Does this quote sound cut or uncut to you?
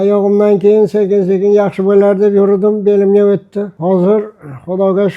cut